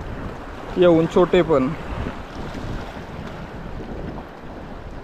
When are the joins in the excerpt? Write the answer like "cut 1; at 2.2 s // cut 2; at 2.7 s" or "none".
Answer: none